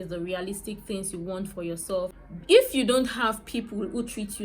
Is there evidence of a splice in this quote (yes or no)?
yes